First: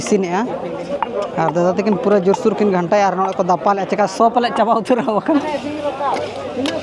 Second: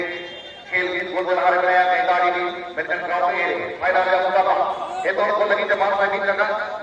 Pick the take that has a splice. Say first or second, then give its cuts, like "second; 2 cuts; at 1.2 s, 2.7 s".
first; 1 cut; at 5.4 s